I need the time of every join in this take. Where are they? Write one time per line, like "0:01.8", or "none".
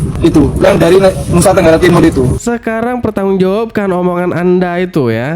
0:02.4